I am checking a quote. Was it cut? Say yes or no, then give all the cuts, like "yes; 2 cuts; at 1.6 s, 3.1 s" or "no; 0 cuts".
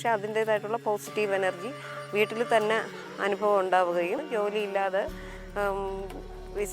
yes; 1 cut; at 4.2 s